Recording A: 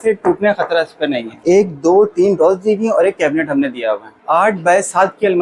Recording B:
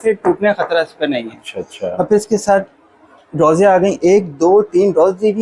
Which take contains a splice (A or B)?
A